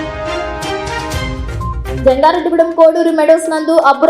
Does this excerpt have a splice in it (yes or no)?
yes